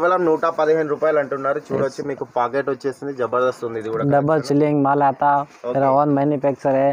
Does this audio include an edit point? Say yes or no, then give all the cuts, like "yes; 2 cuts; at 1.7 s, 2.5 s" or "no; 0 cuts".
no; 0 cuts